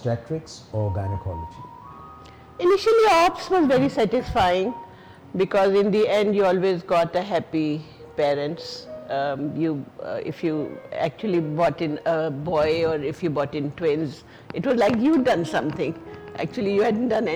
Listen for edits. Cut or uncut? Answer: uncut